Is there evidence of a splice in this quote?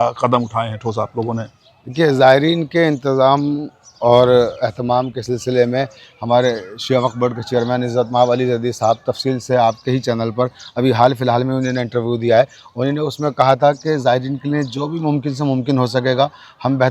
no; 0 cuts

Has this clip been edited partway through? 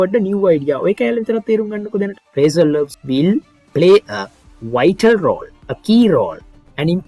yes; 1 cut; at 2.2 s

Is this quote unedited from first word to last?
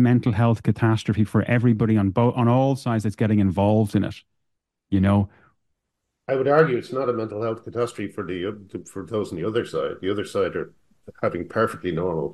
yes; 0 cuts

